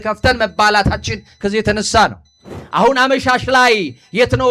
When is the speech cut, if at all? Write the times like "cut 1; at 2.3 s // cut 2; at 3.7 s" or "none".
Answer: cut 1; at 2.5 s